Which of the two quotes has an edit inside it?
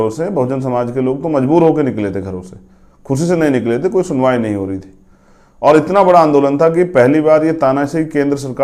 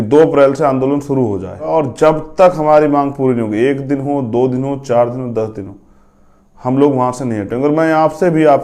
second; 1 cut; at 1.6 s

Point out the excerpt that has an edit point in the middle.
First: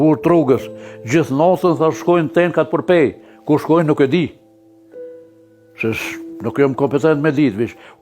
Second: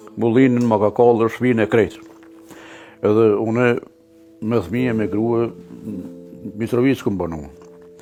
first; 2 cuts; at 4.3 s, 5.5 s

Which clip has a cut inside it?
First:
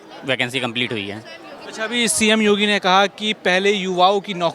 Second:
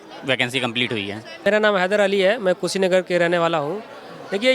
second; 1 cut; at 1.4 s

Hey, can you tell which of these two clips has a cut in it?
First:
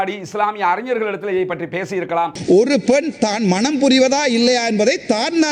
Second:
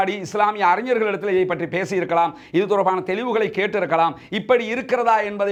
first; 1 cut; at 2.4 s

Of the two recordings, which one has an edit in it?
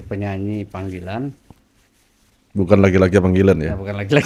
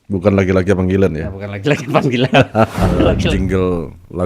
second; 1 cut; at 3.2 s

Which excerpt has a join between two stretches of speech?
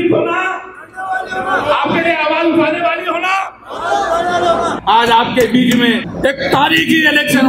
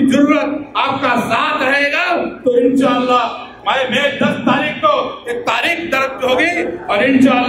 first; 2 cuts; at 4.8 s, 6.1 s

